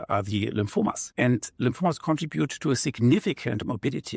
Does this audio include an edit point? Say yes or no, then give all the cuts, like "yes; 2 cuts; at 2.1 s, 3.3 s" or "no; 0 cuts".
yes; 1 cut; at 1.0 s